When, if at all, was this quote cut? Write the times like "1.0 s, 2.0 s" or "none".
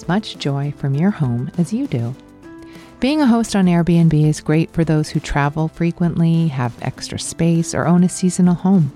none